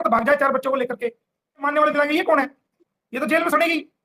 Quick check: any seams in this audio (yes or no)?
yes